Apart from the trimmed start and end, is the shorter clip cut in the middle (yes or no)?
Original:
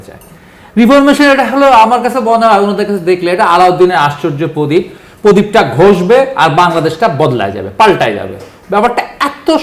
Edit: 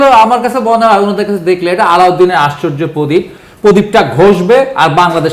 no